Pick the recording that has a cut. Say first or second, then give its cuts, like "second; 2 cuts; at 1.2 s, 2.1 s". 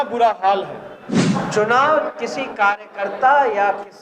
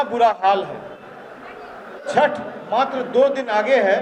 first; 1 cut; at 1.2 s